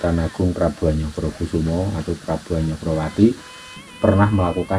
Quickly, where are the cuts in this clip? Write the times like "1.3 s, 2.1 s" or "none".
3.9 s